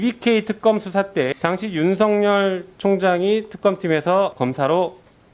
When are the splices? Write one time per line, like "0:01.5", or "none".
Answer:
0:01.3
0:04.3

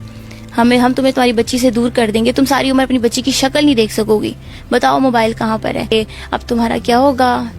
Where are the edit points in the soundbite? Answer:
0:05.9

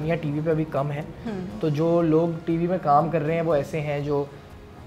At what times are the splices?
none

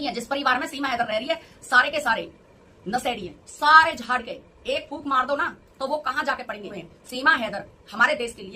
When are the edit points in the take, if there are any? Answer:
0:06.8

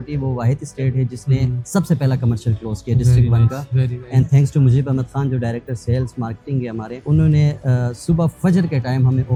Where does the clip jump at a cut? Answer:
none

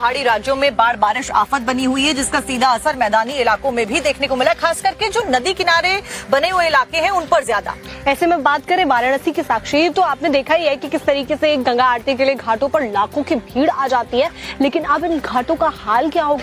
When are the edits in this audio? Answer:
none

